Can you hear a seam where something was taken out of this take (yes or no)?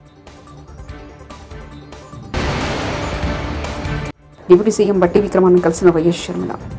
no